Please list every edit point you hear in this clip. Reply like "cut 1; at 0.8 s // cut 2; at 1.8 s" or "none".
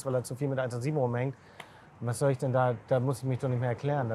none